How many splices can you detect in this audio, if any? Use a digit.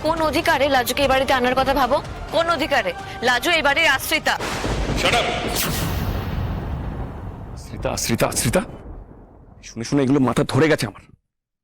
0